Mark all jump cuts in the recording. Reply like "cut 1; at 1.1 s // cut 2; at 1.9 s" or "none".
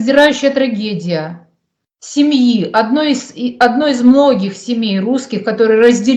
none